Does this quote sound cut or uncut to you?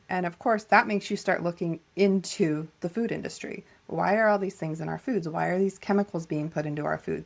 uncut